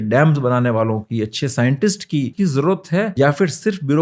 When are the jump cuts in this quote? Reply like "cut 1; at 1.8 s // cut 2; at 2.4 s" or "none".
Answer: cut 1; at 2.3 s // cut 2; at 3.1 s